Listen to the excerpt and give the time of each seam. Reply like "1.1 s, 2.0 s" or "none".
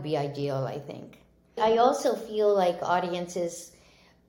1.6 s